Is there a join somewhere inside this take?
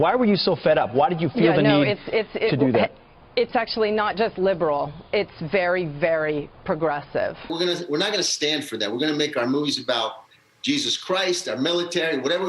yes; 1 cut; at 7.5 s

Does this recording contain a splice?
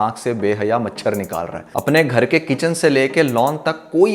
yes; 1 cut; at 1.6 s

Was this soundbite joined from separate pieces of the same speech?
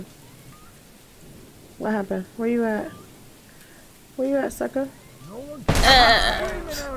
no; 0 cuts

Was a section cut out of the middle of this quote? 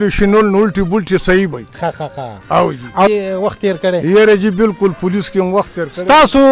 yes; 1 cut; at 3.1 s

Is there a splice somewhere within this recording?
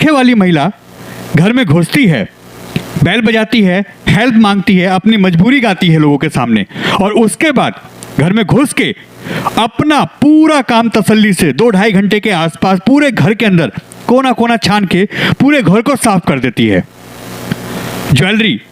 no; 0 cuts

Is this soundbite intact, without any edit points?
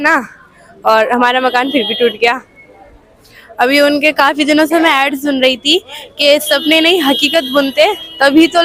yes; 0 cuts

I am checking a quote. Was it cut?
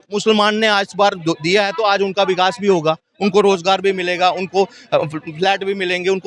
no; 0 cuts

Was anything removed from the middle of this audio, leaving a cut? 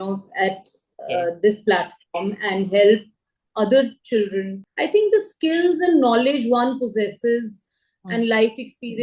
yes; 1 cut; at 4.6 s

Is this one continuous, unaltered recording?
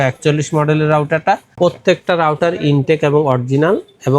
no; 1 cut; at 1.5 s

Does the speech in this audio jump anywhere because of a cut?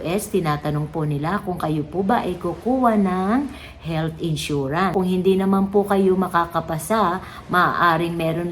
yes; 1 cut; at 4.9 s

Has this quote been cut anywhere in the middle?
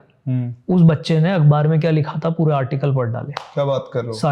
no; 0 cuts

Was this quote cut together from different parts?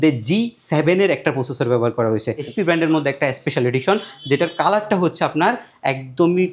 yes; 1 cut; at 2.5 s

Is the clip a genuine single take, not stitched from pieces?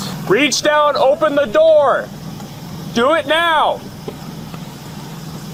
yes; 0 cuts

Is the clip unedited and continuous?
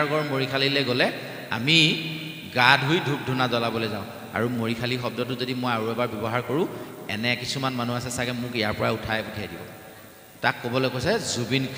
yes; 0 cuts

